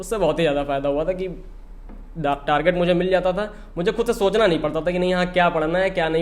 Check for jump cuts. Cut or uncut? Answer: uncut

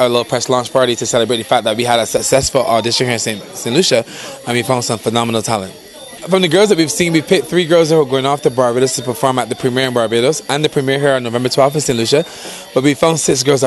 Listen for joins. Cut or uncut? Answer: cut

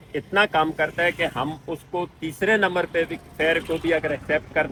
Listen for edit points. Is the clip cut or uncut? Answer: uncut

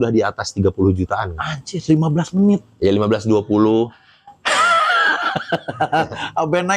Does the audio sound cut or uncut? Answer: uncut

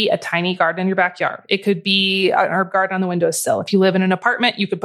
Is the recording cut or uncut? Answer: uncut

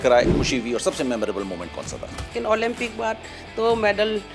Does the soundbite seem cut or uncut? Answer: cut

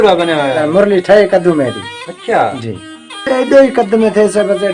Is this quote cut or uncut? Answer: cut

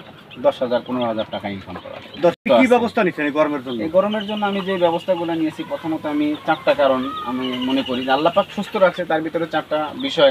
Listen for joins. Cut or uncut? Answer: cut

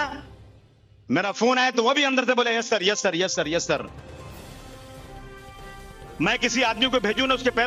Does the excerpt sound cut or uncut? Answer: uncut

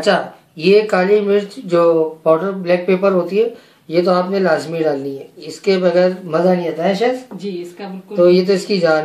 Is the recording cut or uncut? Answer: uncut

